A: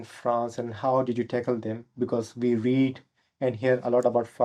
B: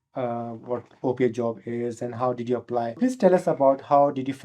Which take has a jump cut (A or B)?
B